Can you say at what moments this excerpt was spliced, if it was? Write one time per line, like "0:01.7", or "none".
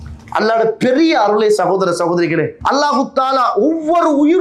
0:02.6